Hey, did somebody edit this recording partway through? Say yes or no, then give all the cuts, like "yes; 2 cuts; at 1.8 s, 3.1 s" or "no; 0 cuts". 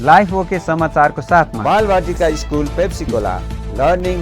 yes; 1 cut; at 1.5 s